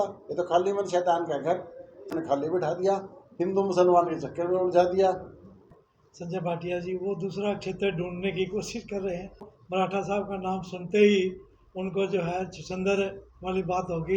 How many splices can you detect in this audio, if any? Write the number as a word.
three